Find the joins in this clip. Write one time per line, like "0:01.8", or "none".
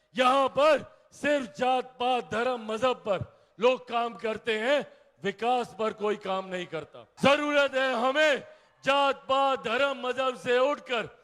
0:07.0